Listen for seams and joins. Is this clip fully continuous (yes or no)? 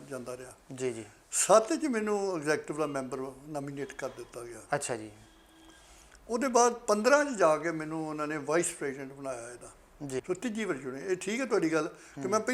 no